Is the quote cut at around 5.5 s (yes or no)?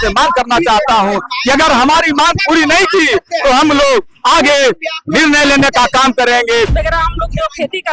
no